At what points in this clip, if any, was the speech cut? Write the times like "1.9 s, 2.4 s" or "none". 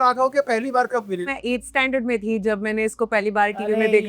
1.2 s